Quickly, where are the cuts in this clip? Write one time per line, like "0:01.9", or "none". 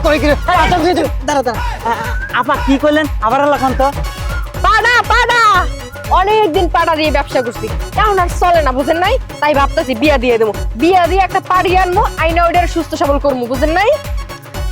0:09.3